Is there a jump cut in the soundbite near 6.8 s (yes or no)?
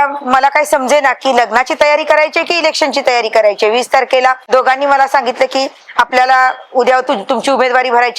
no